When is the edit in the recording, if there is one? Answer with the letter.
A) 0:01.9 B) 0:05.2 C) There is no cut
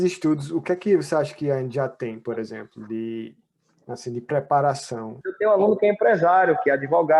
B